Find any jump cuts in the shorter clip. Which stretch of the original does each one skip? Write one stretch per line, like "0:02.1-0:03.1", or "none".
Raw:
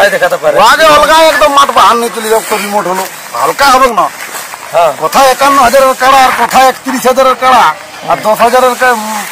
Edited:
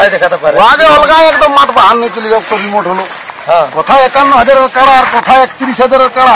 0:03.2-0:04.4